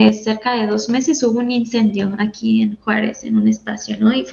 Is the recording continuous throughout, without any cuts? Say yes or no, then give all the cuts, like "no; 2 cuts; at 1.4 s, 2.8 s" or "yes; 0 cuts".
yes; 0 cuts